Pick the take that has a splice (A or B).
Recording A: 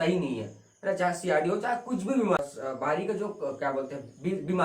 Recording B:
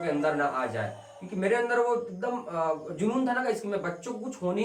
A